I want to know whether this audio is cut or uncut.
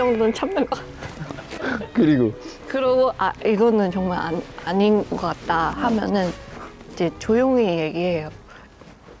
uncut